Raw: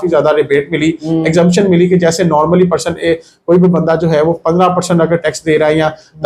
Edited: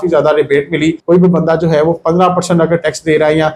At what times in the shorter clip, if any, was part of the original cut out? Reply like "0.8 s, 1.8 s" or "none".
1.0 s